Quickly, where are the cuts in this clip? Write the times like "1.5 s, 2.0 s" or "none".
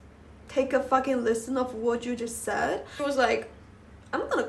2.9 s